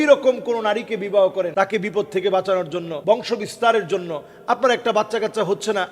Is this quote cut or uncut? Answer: cut